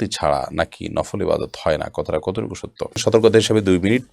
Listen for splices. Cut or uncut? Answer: cut